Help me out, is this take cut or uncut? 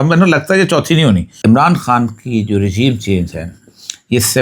cut